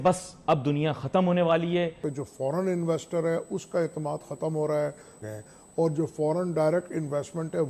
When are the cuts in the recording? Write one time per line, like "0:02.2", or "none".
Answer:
0:02.0
0:05.2